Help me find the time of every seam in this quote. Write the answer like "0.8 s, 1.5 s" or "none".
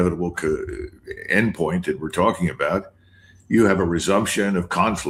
none